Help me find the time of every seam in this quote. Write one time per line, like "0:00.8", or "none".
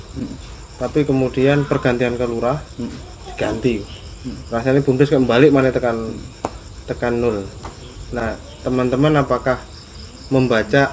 none